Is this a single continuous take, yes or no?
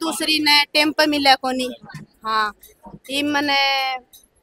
yes